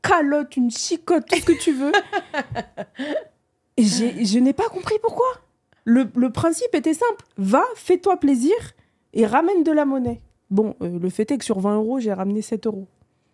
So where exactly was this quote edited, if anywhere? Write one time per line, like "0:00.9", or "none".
none